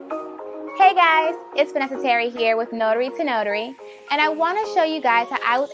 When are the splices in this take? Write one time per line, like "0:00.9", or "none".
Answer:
none